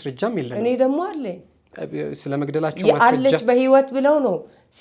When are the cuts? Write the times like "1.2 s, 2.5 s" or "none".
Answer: none

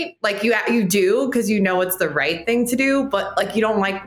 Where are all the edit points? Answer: none

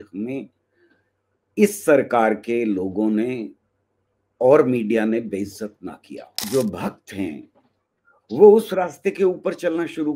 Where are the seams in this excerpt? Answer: 6.4 s

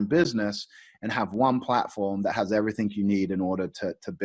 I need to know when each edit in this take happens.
none

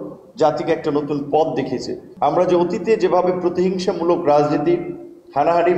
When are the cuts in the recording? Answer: 2.0 s

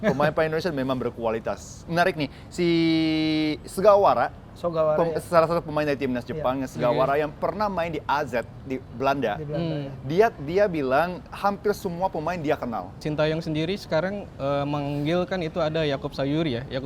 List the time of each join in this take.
1.9 s, 13.0 s

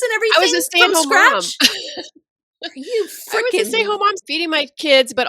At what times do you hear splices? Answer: 4.2 s

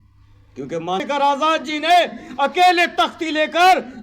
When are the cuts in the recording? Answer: 1.0 s

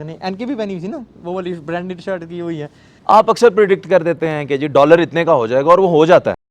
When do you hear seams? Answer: 2.8 s

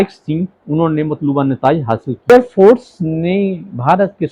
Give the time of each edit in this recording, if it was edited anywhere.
2.3 s

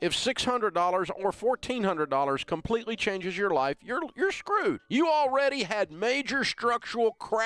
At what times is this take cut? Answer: none

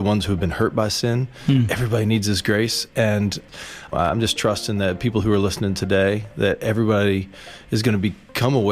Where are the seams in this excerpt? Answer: 3.9 s

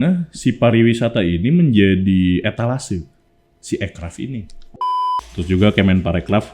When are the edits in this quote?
5.0 s

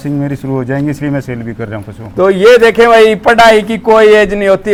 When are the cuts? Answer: none

